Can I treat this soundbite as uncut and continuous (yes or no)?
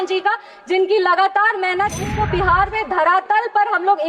no